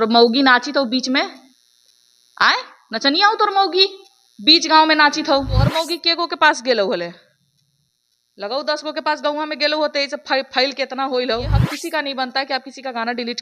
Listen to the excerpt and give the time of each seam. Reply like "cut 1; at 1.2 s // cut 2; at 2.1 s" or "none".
cut 1; at 5.7 s // cut 2; at 11.7 s